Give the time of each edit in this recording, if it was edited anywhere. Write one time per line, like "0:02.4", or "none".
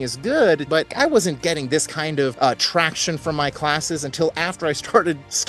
0:00.9
0:02.3